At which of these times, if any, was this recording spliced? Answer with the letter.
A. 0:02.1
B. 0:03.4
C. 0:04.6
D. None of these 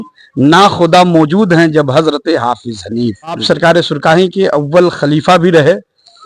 B